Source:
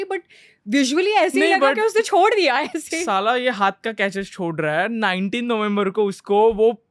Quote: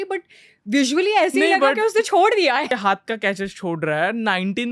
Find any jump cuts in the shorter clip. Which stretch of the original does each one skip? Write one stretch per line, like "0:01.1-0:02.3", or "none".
0:02.7-0:03.4

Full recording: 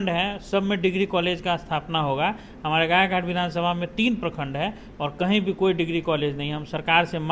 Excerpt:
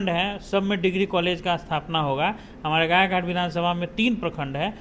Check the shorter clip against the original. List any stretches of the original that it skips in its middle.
none

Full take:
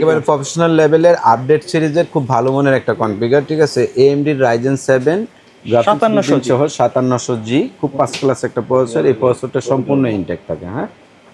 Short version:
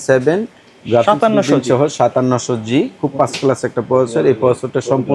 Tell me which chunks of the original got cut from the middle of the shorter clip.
none

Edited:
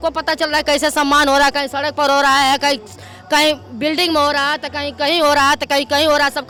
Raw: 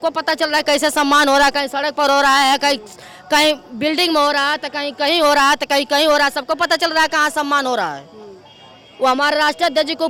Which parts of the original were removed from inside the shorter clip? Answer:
none

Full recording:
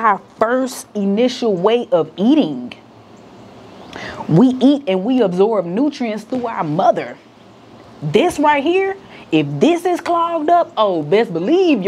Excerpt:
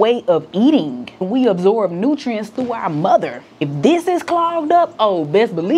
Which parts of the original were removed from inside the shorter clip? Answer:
0:02.9-0:05.0
0:07.5-0:09.5

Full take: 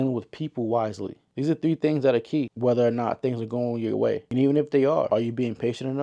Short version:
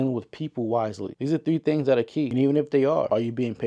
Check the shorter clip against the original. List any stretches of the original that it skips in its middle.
0:01.1-0:01.2
0:02.5-0:04.3

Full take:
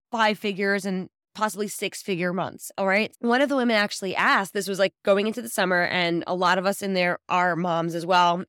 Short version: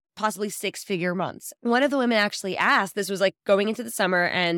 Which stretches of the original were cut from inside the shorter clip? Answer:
0:02.7-0:03.1

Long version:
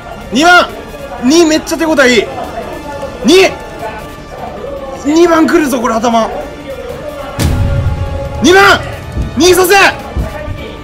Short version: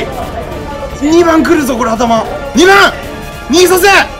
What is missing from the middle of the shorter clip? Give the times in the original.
0:03.1-0:04.9
0:06.4-0:08.3

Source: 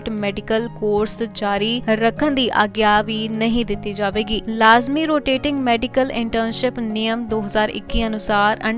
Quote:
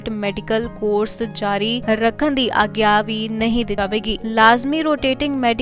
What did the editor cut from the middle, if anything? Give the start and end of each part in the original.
0:03.7-0:04.0

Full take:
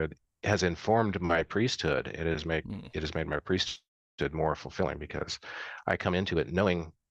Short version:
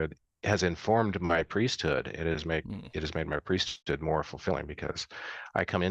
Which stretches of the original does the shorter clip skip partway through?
0:03.7-0:04.0

